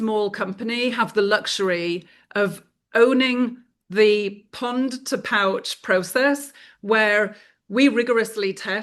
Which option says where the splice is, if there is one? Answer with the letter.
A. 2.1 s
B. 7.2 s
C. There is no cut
C